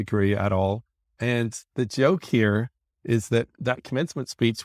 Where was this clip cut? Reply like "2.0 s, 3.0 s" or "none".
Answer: 1.1 s